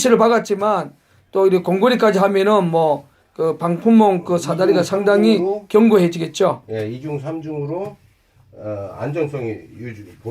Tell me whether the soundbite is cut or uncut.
cut